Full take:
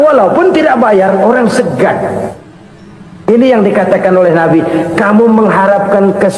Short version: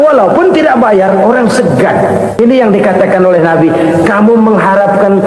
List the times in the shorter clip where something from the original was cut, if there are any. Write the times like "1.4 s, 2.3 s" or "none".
2.4 s

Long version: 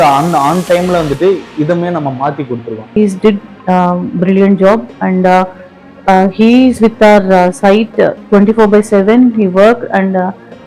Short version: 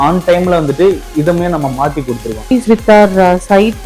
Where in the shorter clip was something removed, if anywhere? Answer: 2.5 s

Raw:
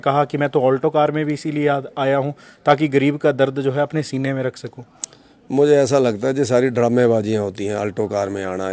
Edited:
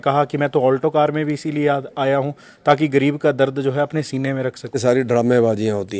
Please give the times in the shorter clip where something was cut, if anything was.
4.8 s

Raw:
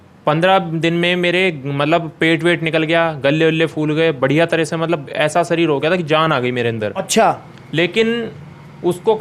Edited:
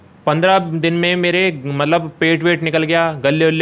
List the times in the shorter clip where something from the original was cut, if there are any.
none

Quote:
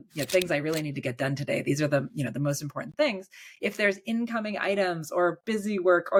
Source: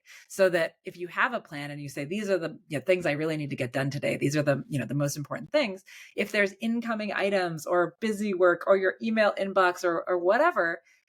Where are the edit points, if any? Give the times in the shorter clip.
none

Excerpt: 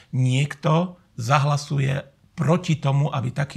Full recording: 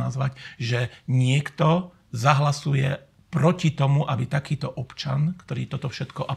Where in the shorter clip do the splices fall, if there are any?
none

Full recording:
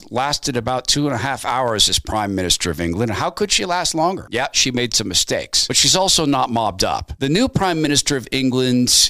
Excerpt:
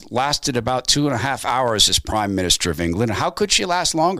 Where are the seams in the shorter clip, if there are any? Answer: none

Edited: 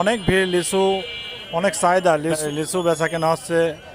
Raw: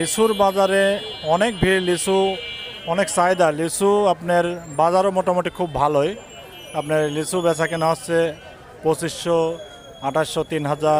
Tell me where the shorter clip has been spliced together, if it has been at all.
2.4 s

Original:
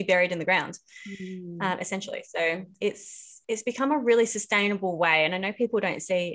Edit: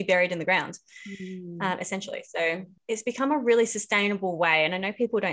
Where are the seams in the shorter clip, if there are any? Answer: 2.7 s

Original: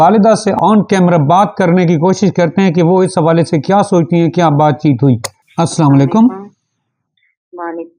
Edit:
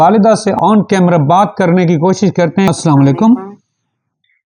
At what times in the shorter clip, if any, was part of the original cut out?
2.7 s

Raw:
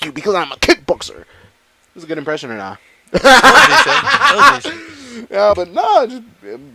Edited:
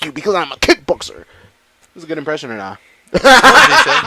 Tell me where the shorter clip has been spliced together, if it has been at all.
none

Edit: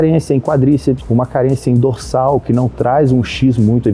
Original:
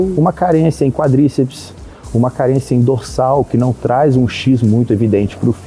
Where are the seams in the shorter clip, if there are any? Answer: 1.0 s

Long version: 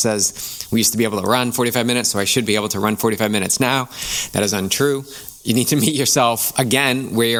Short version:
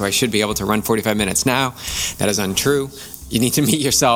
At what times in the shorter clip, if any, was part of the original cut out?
none

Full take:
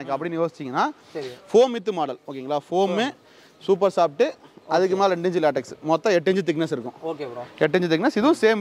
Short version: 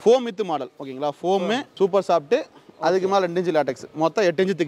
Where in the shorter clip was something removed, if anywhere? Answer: 1.7 s

